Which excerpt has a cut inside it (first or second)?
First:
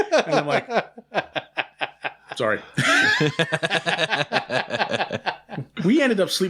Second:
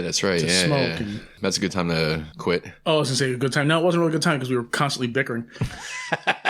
second